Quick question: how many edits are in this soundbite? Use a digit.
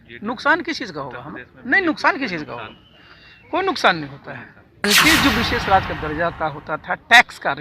1